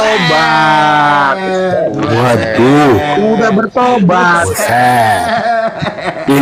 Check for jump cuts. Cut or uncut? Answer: uncut